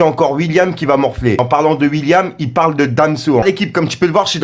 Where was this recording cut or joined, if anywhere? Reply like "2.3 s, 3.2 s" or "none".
1.4 s, 3.4 s